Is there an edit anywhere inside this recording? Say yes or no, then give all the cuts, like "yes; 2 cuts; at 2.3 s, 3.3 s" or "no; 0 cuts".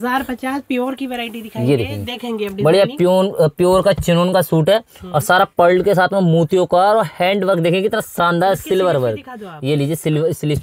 no; 0 cuts